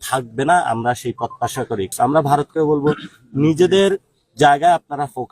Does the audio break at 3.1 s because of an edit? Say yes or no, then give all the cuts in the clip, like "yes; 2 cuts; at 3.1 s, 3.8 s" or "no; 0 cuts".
no; 1 cut; at 1.9 s